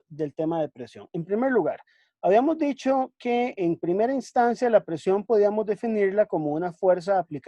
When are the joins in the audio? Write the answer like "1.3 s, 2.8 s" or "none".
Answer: none